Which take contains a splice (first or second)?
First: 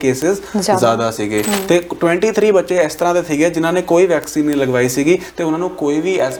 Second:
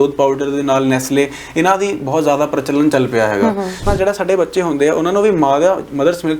second